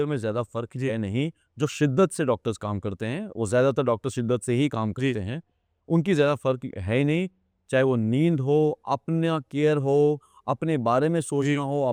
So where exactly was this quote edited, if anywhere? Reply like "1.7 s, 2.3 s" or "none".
none